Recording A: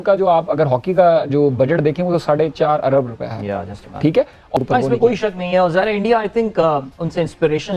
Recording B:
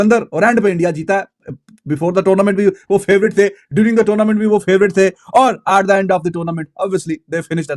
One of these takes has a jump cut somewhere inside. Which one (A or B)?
A